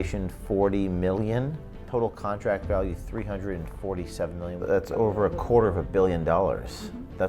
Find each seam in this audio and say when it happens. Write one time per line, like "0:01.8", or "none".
0:01.8
0:04.6

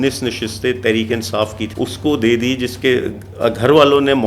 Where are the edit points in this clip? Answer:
0:01.6

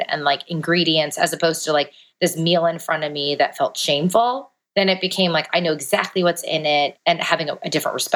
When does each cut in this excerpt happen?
0:04.5
0:07.0

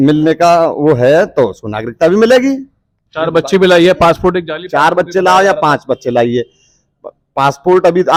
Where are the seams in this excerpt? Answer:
none

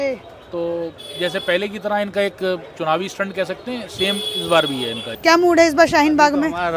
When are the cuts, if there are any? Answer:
0:05.0

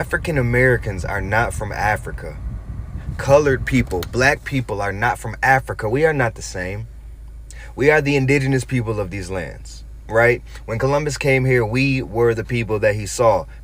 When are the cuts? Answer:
none

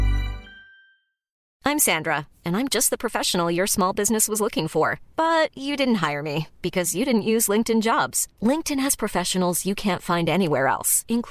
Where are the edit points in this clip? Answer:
0:01.3

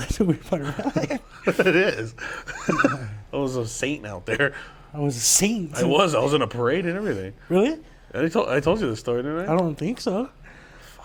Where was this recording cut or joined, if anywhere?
none

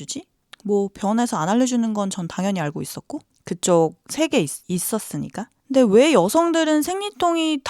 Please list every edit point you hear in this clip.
0:04.6

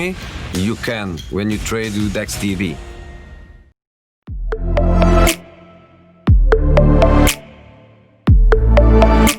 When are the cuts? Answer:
0:04.2

